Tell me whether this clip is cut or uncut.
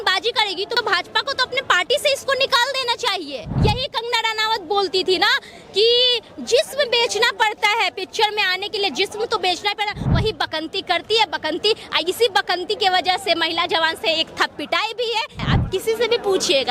cut